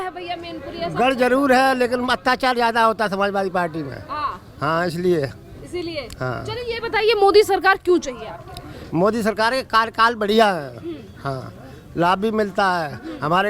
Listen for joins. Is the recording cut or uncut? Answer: uncut